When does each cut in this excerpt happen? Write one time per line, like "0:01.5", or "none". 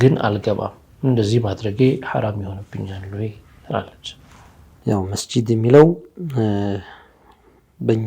none